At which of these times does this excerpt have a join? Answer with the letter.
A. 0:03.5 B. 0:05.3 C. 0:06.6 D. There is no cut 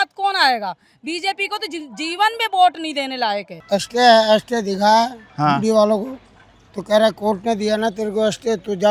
A